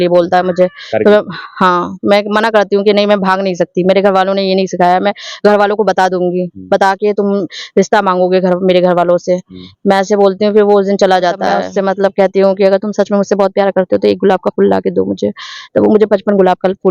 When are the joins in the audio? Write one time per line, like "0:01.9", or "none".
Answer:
0:11.7